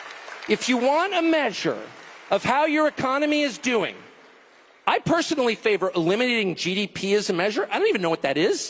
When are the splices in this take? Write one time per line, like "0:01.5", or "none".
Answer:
none